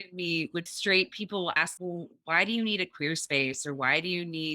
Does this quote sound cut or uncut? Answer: cut